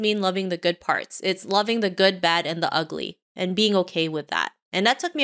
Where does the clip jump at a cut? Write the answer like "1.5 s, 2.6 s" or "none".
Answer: none